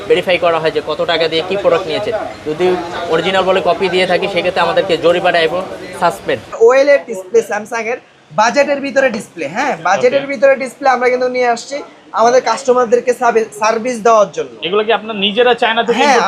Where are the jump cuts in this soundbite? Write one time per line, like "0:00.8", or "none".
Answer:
0:06.5